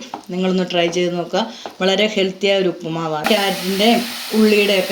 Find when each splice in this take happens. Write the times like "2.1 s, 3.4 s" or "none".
3.3 s